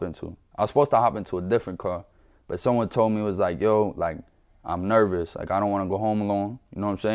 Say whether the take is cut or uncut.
uncut